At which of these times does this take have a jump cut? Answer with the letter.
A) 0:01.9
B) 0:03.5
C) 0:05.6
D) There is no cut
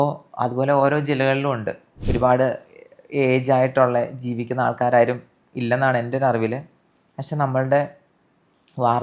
A